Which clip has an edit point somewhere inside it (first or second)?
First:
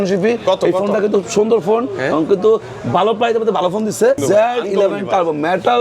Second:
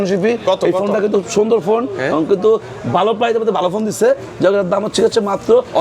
first